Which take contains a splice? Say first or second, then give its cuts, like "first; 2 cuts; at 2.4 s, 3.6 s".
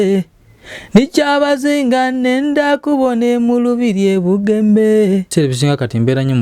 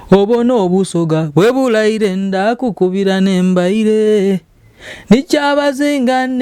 first; 1 cut; at 5.3 s